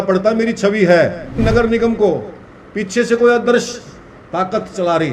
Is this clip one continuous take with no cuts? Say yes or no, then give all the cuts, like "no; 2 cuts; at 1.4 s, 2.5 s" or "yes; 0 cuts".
no; 1 cut; at 1.4 s